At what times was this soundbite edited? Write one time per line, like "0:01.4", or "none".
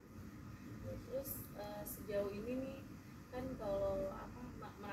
none